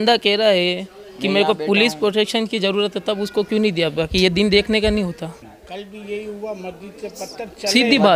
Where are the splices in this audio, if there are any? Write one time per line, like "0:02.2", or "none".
0:05.5